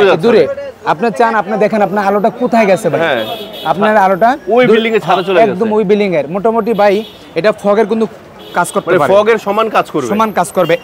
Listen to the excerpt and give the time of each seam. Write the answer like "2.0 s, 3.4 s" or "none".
none